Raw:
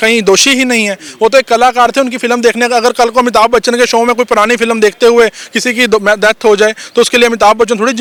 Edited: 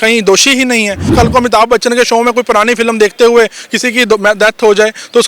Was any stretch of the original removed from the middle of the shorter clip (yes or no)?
yes